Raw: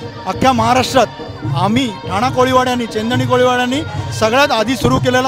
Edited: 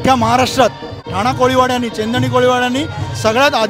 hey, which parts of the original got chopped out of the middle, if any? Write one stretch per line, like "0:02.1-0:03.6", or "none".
0:01.4-0:02.0